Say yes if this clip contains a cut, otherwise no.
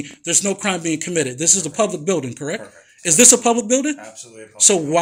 no